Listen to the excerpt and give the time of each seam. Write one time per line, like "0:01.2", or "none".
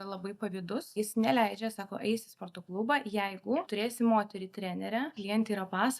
0:00.9
0:03.7
0:05.2